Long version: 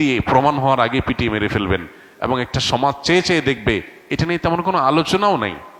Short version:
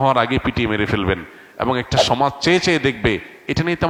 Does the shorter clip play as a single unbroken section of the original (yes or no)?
yes